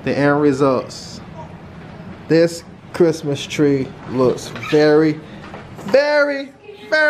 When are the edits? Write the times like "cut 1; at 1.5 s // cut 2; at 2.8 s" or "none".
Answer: none